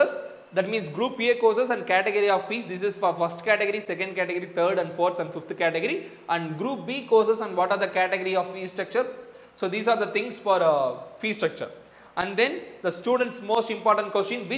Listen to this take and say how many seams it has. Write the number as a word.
zero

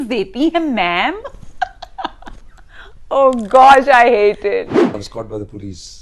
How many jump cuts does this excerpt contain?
one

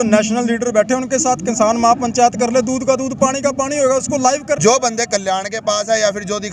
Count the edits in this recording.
one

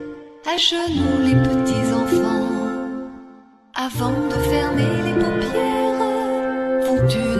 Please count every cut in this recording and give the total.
one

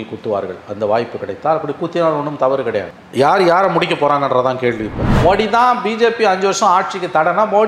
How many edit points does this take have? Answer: one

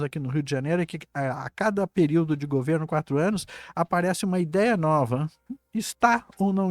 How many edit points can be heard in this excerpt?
zero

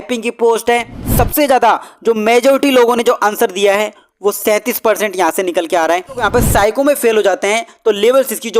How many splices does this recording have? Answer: two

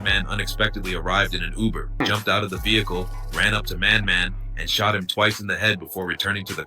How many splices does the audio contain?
one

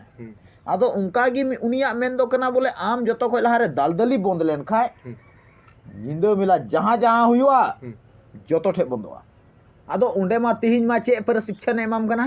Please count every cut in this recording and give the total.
one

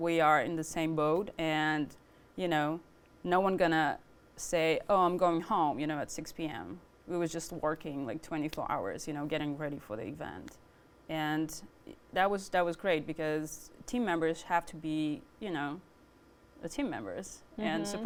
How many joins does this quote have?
zero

